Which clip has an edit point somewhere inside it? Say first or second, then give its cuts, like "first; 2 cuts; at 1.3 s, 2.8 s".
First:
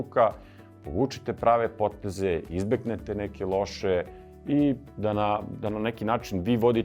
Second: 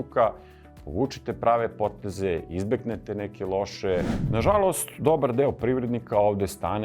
second; 1 cut; at 4.2 s